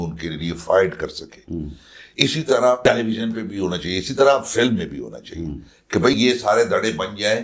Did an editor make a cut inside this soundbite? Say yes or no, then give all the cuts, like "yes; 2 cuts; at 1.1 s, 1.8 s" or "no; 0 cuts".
no; 0 cuts